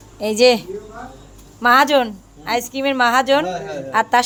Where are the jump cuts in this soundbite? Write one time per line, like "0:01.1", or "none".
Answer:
none